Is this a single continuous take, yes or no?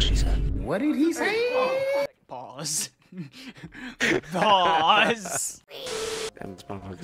yes